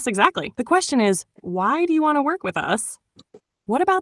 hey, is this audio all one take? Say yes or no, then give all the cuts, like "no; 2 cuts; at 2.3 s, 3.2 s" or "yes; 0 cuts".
yes; 0 cuts